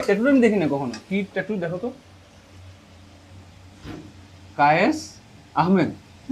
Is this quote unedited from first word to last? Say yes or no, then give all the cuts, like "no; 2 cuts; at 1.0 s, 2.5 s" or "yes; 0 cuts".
yes; 0 cuts